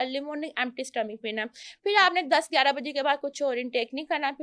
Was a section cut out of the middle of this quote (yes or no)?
no